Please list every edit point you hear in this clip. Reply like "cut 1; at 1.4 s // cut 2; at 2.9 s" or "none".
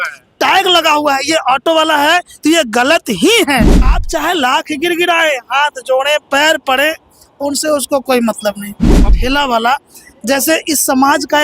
cut 1; at 3.9 s // cut 2; at 9.0 s